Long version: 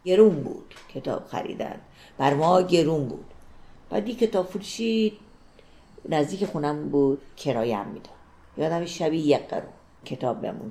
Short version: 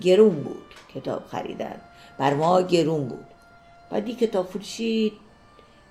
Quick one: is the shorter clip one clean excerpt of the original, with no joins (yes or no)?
yes